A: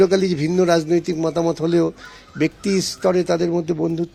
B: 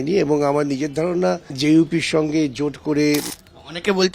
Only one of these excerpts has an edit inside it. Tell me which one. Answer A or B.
B